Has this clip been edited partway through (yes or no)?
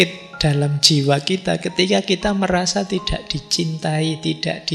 no